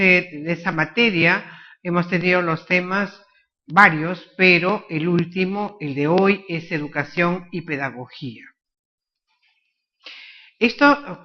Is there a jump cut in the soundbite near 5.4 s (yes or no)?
no